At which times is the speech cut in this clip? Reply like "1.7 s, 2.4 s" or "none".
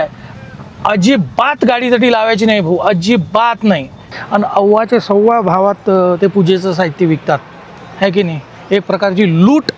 4.0 s